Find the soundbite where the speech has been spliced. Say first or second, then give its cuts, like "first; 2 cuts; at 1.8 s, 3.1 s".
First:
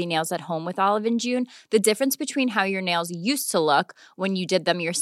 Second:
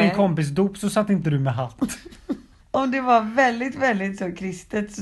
second; 1 cut; at 2.5 s